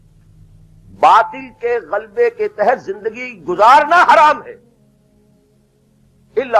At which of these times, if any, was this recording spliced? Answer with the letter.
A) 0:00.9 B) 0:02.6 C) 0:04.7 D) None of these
A